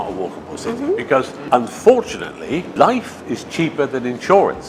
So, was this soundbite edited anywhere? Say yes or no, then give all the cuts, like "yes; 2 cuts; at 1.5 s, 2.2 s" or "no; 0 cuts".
yes; 2 cuts; at 1.4 s, 2.7 s